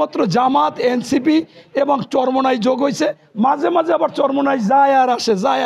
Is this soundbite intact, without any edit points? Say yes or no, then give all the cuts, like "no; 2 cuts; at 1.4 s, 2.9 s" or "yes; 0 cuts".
yes; 0 cuts